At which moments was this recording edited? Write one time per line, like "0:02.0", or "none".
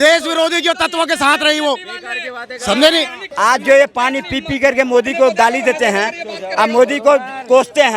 0:03.2